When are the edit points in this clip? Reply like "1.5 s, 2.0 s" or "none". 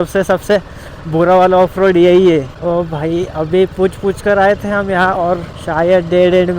2.5 s, 5.6 s